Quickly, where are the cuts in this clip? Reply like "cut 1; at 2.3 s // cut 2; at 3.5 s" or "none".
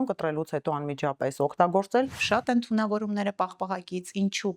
cut 1; at 2.2 s